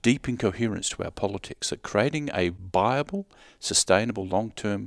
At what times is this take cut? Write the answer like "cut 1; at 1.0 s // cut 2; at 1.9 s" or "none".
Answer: cut 1; at 2.6 s